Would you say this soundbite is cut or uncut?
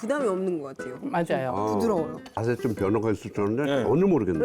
cut